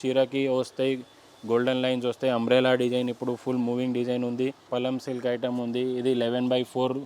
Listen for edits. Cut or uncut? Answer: cut